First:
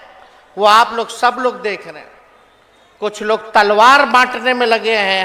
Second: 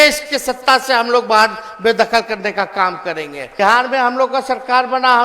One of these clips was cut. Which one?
second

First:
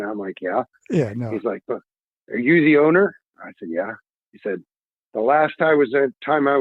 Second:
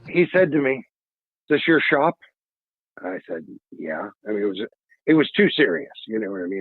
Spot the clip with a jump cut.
second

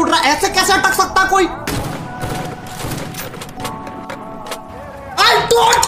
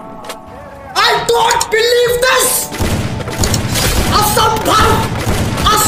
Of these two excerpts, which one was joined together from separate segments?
first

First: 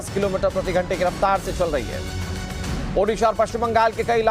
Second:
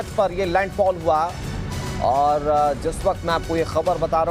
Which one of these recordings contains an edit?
first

